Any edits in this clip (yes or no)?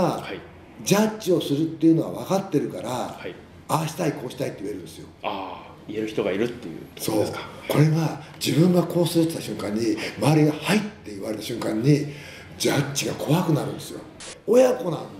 yes